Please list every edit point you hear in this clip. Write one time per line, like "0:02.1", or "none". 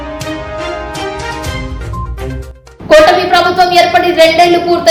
none